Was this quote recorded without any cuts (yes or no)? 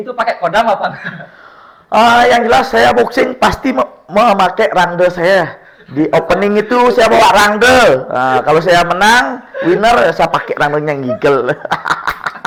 yes